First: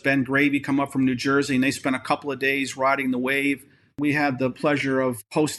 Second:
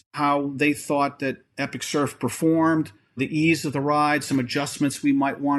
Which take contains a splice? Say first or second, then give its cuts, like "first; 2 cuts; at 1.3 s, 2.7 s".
first; 1 cut; at 4.0 s